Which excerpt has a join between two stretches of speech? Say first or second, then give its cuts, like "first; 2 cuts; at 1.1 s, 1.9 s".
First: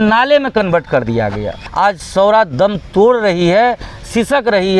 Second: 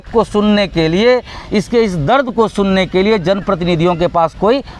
first; 1 cut; at 1.6 s